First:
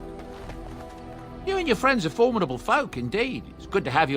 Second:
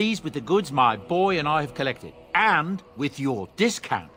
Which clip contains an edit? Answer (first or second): first